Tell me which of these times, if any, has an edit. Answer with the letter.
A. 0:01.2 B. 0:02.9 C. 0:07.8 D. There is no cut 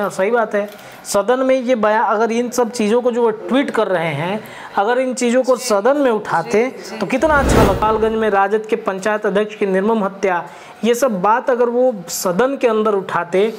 C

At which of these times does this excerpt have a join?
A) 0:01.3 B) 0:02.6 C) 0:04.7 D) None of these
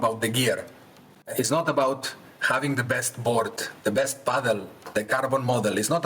A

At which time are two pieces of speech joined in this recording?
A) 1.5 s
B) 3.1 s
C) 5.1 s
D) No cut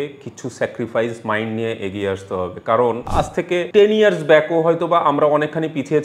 B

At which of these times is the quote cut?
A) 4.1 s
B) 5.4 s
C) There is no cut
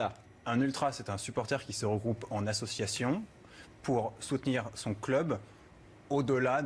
B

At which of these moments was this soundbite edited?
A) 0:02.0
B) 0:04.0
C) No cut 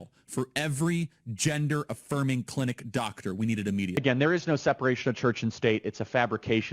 B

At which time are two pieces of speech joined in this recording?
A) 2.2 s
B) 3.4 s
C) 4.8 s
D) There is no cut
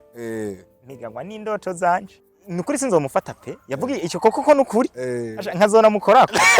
A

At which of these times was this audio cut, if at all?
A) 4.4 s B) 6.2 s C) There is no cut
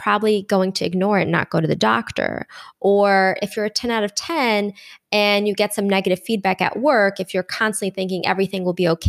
C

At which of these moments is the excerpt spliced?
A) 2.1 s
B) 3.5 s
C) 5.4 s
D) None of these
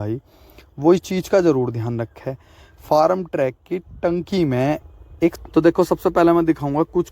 C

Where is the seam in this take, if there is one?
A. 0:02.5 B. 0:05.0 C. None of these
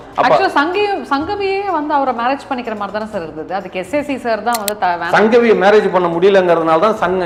C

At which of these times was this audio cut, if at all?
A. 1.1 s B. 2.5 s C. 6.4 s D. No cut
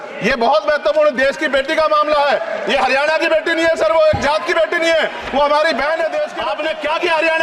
C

